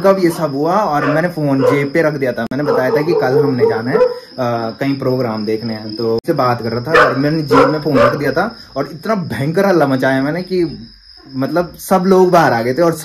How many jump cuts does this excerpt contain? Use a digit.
0